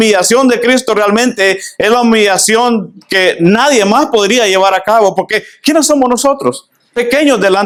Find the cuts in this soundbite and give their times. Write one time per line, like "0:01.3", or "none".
none